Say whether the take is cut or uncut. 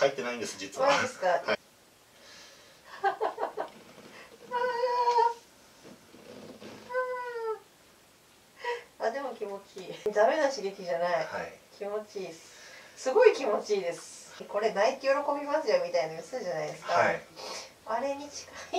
cut